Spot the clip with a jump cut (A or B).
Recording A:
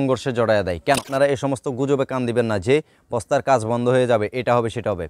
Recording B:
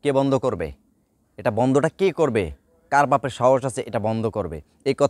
A